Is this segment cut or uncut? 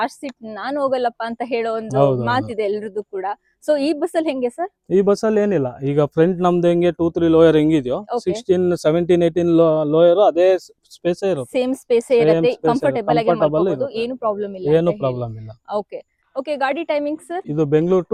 uncut